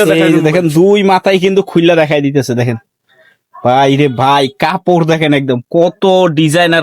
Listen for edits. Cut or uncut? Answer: uncut